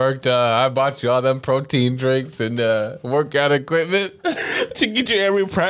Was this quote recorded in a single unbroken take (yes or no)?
yes